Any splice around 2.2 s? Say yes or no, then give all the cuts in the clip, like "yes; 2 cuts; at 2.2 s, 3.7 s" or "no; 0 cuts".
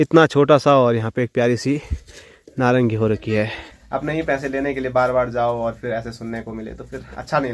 no; 1 cut; at 3.8 s